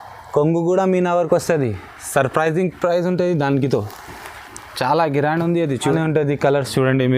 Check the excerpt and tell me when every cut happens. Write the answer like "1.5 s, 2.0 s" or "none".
5.9 s

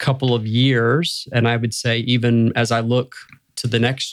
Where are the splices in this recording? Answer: none

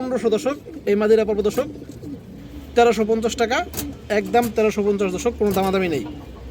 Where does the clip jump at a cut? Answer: none

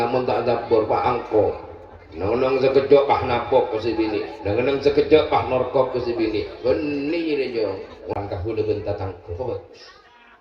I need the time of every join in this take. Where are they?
8.1 s

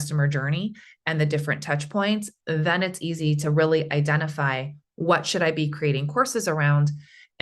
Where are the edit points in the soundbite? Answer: none

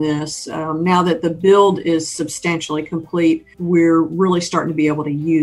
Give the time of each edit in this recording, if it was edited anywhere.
3.5 s

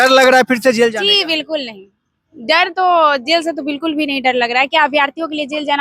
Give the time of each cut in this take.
none

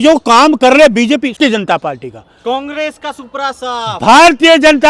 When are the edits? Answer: 1.4 s

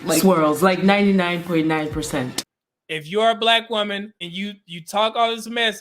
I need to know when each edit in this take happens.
2.3 s, 4.2 s

